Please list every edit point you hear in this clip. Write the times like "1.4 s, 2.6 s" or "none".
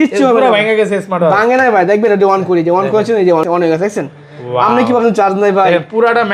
3.4 s

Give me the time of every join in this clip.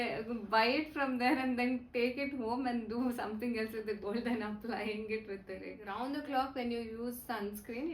5.8 s

